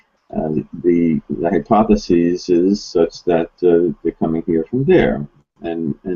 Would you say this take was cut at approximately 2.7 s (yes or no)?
no